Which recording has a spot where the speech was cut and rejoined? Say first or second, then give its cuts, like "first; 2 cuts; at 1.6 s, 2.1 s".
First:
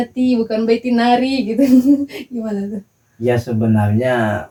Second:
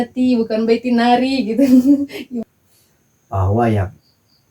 second; 1 cut; at 2.4 s